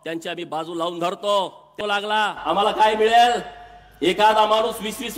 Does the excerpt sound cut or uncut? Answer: cut